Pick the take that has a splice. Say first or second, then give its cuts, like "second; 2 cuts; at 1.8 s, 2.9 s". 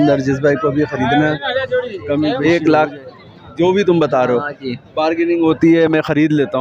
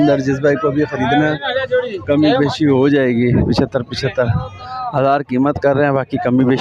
first; 1 cut; at 2.4 s